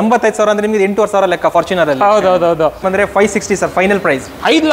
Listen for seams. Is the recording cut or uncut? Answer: cut